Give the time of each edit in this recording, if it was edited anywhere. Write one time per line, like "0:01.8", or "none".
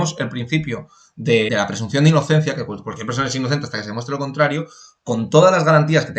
0:01.5

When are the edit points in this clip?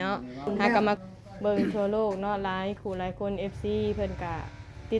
0:01.0

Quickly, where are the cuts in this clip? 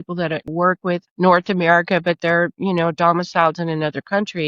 0:01.1

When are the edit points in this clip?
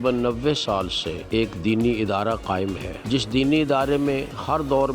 0:01.1
0:02.9

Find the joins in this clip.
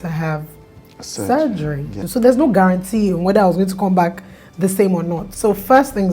0:01.9
0:05.3

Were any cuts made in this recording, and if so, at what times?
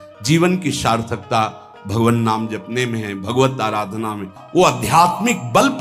0:04.4

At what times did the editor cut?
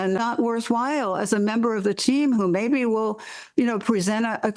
none

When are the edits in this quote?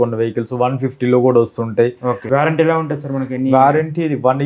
0:02.2

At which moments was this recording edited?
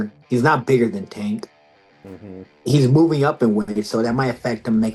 none

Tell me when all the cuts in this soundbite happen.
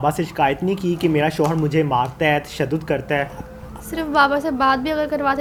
none

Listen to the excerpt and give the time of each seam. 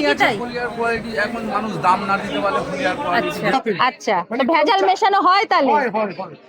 0:03.5

